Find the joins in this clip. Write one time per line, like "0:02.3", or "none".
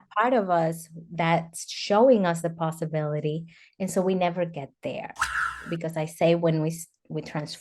0:05.6